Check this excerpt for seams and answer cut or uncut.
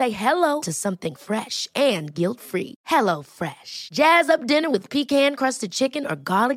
uncut